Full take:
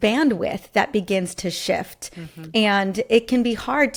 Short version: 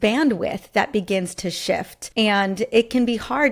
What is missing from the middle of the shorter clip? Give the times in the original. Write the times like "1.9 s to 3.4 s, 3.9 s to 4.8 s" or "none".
2.0 s to 2.3 s